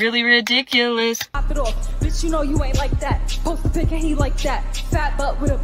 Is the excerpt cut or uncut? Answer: cut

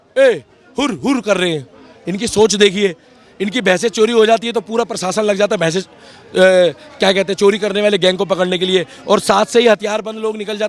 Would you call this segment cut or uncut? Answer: uncut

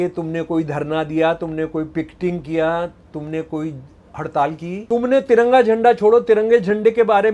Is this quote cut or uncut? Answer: cut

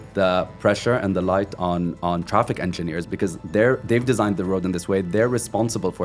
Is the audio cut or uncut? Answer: uncut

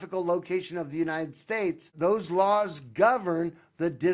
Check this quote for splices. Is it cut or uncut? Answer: cut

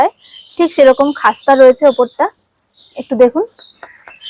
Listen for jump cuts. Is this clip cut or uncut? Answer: uncut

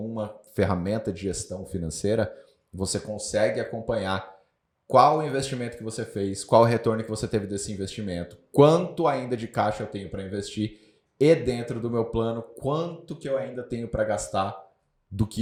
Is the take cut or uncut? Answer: uncut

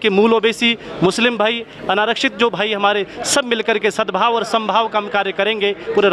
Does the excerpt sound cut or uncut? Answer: uncut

